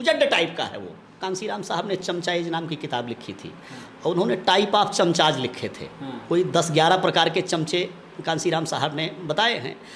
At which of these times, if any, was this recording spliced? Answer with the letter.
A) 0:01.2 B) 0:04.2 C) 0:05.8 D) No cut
A